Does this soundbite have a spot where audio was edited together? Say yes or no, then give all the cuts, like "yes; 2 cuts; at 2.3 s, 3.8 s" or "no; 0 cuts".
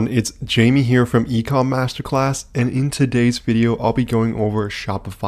no; 0 cuts